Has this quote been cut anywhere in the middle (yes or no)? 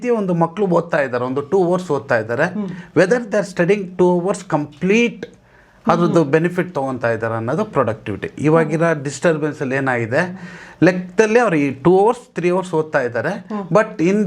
no